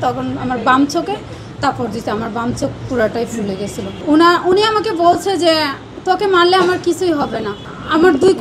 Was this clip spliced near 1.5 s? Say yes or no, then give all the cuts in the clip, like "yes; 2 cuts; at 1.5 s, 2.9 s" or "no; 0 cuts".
no; 1 cut; at 3.9 s